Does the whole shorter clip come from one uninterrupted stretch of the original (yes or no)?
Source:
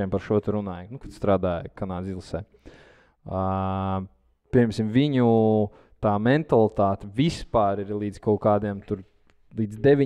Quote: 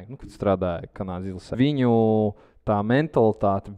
no